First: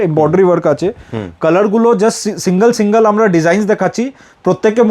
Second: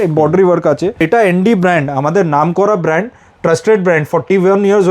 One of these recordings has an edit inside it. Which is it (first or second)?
second